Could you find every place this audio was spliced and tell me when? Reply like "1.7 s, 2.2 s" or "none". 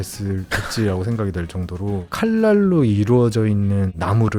2.1 s